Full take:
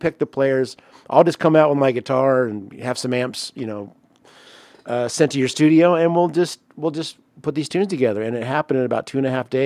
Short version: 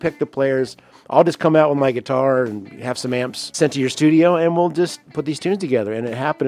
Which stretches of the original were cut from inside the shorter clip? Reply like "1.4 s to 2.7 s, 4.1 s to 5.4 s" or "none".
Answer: 3.5 s to 5.1 s, 6.6 s to 7.3 s